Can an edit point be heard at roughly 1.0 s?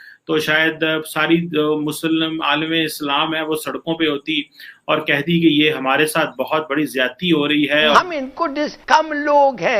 no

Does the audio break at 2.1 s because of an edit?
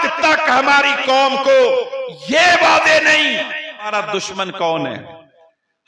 no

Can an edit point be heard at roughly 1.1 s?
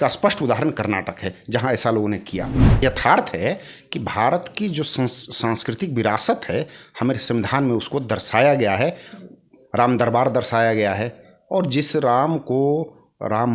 no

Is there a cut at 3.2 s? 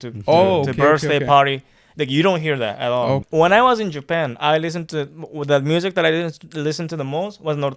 yes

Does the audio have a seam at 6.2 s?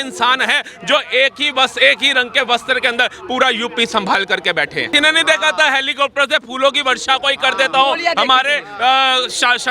no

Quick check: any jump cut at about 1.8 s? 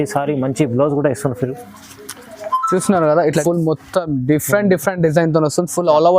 no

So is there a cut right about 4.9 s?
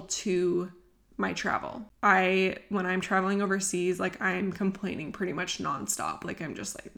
no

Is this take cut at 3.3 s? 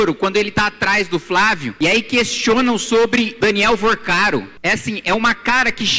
yes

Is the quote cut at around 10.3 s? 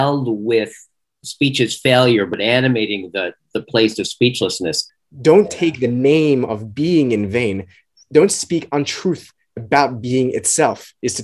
no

